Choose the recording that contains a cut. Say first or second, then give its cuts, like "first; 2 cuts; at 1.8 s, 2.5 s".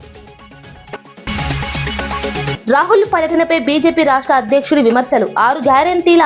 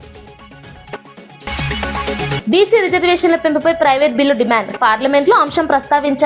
first; 1 cut; at 1.0 s